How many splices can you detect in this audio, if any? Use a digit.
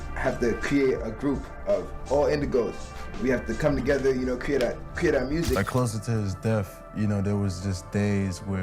1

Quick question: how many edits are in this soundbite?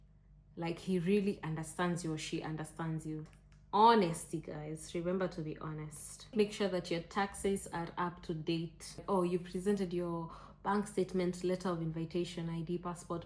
3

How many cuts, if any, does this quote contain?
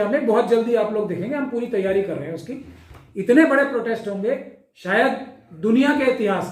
0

